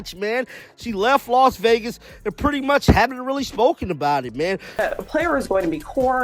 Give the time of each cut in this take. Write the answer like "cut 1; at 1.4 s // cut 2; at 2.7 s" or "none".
cut 1; at 4.7 s